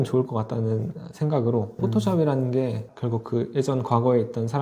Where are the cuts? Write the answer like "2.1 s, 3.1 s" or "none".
1.7 s, 2.9 s